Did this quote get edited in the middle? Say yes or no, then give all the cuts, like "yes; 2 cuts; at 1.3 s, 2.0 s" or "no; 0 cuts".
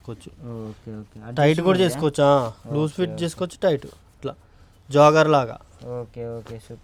no; 0 cuts